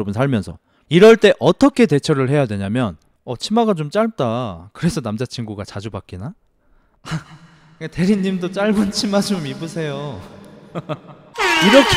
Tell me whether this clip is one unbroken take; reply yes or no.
yes